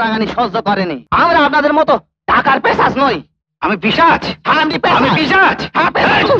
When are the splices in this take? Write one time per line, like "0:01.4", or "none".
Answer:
0:01.0